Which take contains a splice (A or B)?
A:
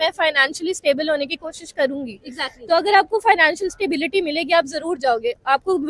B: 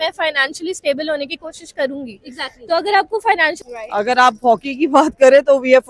B